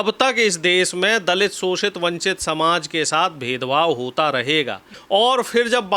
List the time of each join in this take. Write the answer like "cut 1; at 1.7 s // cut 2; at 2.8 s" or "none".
cut 1; at 4.9 s

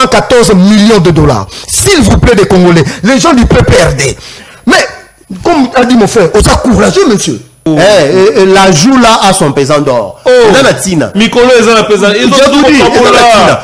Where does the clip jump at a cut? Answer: cut 1; at 7.7 s

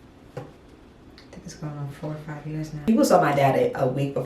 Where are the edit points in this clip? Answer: cut 1; at 2.7 s

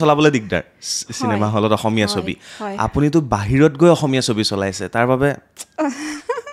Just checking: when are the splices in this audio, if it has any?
none

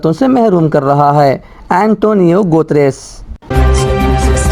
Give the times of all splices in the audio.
cut 1; at 3.4 s

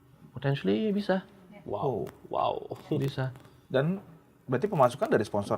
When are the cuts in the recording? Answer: none

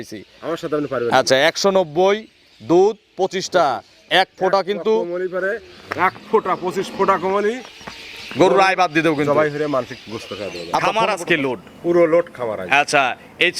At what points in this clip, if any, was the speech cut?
cut 1; at 10.7 s

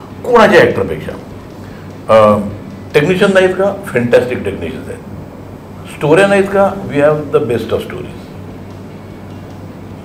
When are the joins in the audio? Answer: none

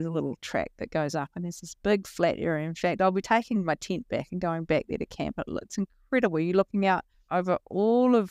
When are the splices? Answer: cut 1; at 7.2 s

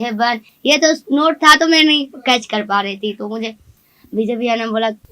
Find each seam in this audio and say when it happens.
none

